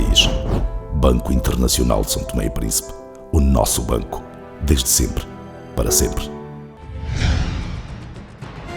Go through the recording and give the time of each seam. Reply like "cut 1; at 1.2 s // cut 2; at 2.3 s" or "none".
cut 1; at 6.7 s